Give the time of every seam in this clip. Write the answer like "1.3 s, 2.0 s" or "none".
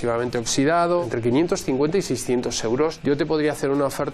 1.0 s, 3.0 s